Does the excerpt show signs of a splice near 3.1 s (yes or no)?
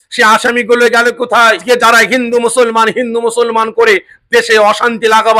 no